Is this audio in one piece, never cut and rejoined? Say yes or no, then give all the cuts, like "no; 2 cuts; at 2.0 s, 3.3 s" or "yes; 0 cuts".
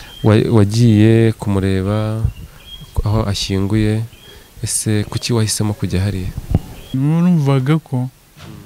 no; 1 cut; at 6.9 s